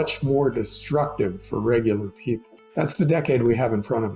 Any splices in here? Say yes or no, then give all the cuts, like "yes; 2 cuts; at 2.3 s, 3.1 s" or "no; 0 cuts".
yes; 1 cut; at 2.6 s